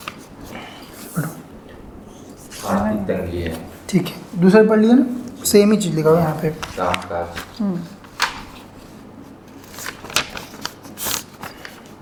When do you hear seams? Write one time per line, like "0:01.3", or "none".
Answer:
none